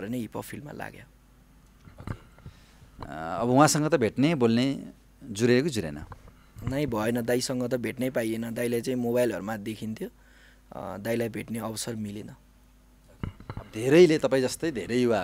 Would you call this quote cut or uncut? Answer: uncut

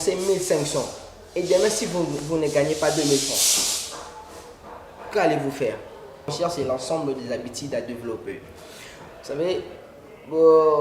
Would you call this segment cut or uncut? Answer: cut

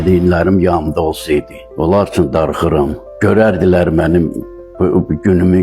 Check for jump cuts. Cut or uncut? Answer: cut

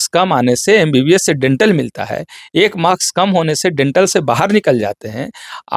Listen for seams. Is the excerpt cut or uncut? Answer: uncut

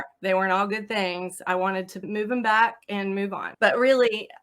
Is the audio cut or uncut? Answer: cut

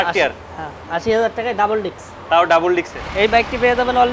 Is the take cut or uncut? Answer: cut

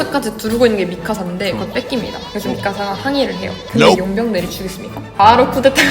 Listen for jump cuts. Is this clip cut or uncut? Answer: uncut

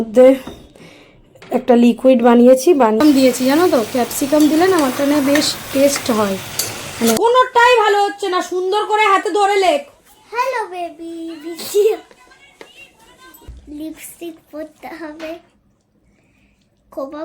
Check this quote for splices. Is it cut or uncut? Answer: cut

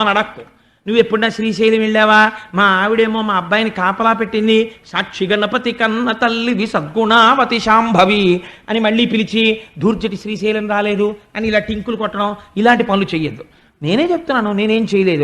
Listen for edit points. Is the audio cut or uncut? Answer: uncut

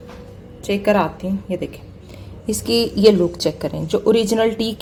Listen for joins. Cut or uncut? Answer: uncut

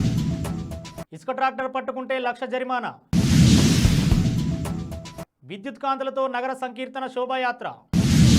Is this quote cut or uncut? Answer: cut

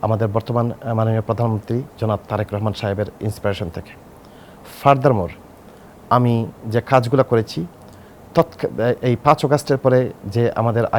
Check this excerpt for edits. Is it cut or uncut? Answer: uncut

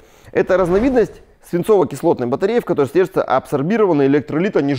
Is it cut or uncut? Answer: uncut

